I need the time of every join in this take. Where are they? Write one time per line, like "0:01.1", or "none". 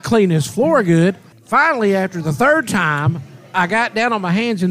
0:01.3